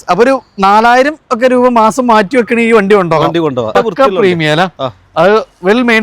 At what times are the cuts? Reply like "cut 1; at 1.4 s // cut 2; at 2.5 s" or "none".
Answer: cut 1; at 3.7 s